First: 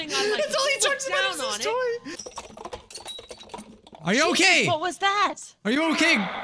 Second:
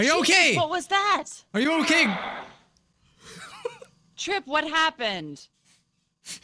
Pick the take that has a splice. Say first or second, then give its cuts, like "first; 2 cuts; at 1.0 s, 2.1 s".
first; 1 cut; at 2.1 s